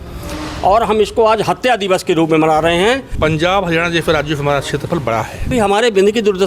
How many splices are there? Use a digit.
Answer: 2